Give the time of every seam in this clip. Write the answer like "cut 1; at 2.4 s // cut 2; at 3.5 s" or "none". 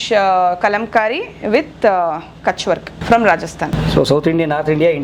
cut 1; at 2.9 s // cut 2; at 3.7 s